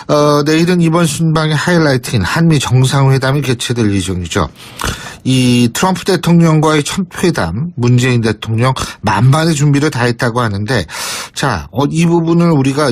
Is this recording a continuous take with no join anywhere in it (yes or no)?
yes